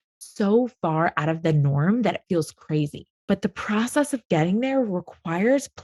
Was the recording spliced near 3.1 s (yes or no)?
yes